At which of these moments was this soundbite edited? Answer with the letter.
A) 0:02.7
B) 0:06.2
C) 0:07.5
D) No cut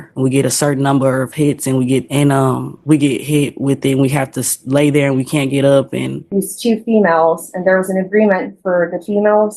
B